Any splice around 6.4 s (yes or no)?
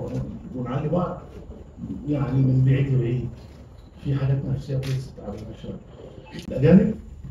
yes